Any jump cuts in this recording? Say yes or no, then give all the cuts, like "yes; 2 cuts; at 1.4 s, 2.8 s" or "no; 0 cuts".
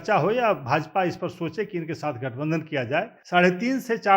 yes; 1 cut; at 3.2 s